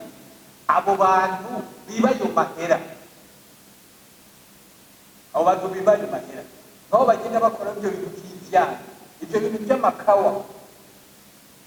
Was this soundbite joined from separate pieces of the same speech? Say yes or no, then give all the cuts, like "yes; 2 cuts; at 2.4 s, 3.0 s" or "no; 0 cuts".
no; 0 cuts